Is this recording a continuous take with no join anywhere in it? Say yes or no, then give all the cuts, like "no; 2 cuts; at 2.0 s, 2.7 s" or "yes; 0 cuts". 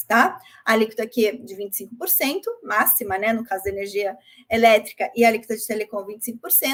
yes; 0 cuts